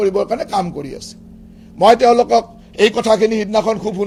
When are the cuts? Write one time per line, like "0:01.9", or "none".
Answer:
none